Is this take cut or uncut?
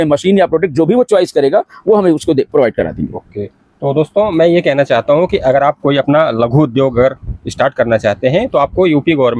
uncut